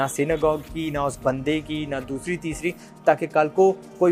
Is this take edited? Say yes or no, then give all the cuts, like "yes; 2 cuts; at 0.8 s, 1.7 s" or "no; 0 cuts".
no; 0 cuts